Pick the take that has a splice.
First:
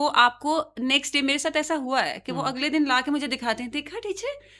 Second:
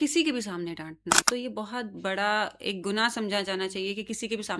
second; 1 cut; at 1.2 s

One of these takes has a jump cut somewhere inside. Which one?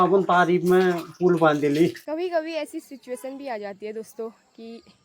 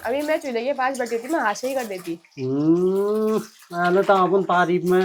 first; 1 cut; at 2.0 s

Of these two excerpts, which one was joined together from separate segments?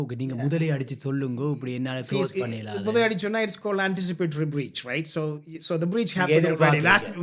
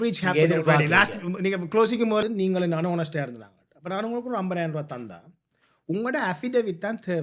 second; 1 cut; at 2.2 s

